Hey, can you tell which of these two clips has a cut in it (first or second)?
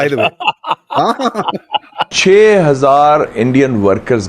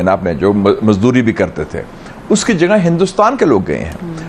first